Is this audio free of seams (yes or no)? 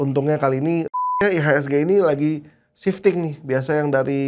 no